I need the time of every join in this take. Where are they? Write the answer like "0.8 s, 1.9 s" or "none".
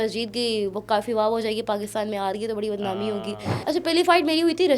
3.5 s